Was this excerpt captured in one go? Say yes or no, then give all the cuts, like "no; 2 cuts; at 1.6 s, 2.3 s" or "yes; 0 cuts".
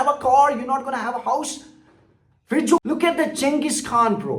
no; 1 cut; at 2.8 s